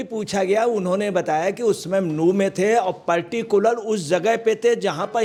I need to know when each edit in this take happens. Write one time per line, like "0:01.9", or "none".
none